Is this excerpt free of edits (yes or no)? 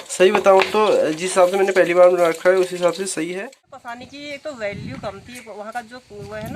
no